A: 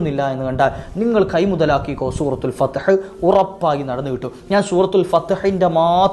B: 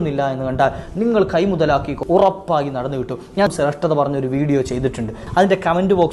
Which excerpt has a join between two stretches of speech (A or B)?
B